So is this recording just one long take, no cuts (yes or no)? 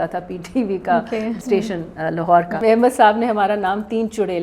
no